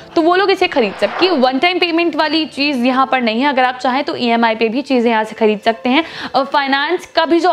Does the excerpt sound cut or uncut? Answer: cut